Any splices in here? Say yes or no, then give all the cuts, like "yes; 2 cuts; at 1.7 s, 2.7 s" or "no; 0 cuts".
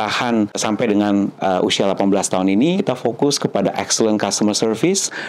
yes; 1 cut; at 2.8 s